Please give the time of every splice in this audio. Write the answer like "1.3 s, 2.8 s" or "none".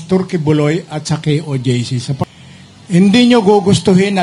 2.3 s